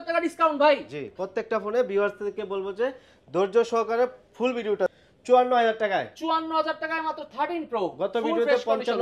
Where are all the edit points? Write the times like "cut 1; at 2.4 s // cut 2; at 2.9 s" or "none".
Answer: cut 1; at 5.0 s